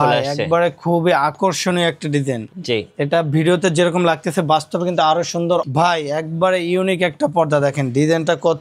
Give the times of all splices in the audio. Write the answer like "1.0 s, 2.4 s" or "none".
5.6 s